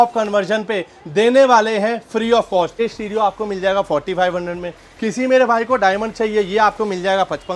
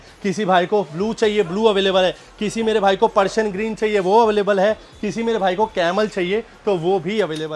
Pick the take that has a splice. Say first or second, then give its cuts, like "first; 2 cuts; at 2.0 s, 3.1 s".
first; 1 cut; at 2.8 s